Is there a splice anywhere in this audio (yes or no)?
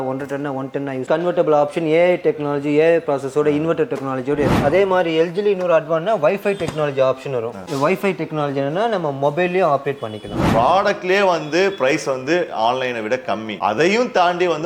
yes